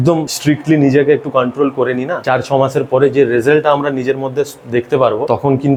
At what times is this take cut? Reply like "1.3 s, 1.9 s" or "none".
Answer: none